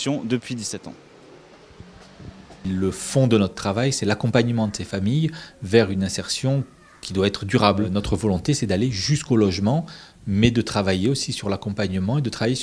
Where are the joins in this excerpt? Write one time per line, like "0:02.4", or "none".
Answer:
0:02.5